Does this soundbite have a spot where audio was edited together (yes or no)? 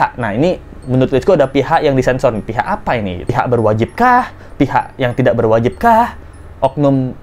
no